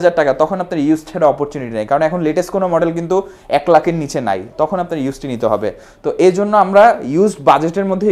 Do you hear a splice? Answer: no; 0 cuts

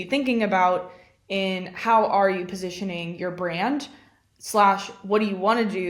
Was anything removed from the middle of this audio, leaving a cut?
no; 0 cuts

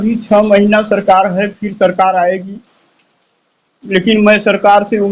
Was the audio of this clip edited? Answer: no; 0 cuts

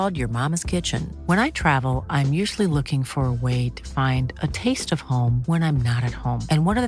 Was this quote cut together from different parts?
no; 0 cuts

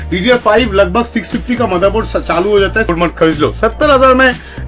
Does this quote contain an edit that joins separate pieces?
yes; 1 cut; at 2.9 s

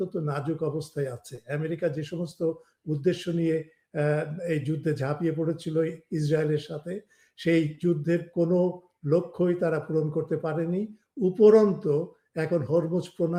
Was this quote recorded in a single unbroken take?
yes; 0 cuts

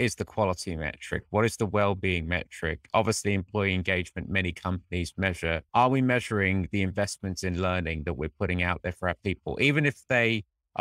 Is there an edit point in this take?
no; 0 cuts

